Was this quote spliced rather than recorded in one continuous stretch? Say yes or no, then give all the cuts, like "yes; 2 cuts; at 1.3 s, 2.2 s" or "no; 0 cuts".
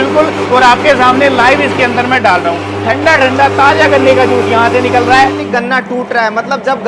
yes; 2 cuts; at 2.7 s, 5.4 s